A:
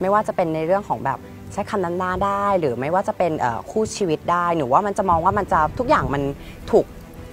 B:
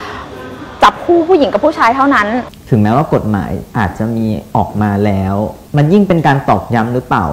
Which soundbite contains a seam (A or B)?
B